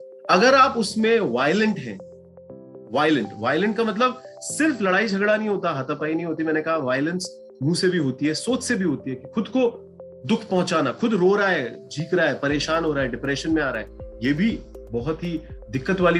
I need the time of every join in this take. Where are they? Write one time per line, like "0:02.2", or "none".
none